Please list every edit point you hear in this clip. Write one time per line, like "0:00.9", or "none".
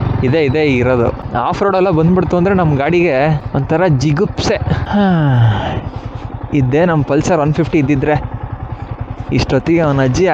0:01.2
0:03.4
0:04.8

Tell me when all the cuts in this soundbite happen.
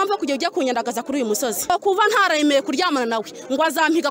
0:01.7

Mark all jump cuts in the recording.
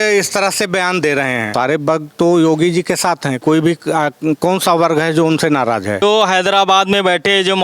0:01.5
0:06.0

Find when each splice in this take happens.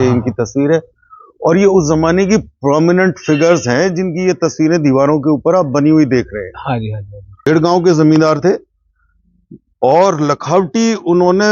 0:07.5

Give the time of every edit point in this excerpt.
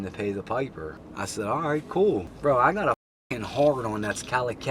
0:01.0
0:02.3

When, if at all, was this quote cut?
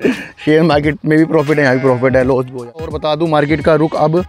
0:02.9

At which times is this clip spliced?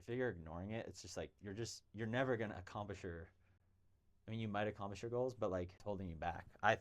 0:05.8

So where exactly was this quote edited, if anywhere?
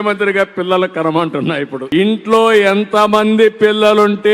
0:01.9

